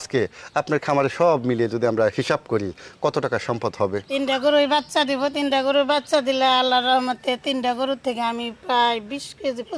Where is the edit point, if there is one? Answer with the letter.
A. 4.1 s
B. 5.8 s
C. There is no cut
A